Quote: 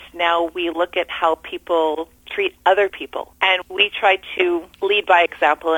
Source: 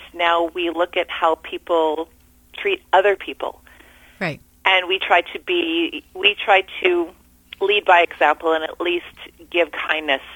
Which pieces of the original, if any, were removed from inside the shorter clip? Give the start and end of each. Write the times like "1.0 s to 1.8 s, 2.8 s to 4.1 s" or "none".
2.2 s to 2.4 s, 3.9 s to 6.0 s, 7.1 s to 7.5 s